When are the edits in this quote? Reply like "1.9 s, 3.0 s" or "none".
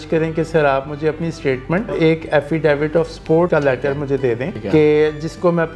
1.9 s, 3.5 s, 4.5 s